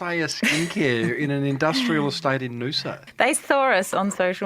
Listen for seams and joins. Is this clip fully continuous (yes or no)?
no